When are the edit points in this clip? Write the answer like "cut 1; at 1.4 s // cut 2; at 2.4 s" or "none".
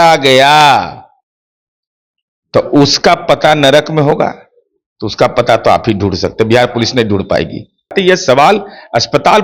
cut 1; at 7.9 s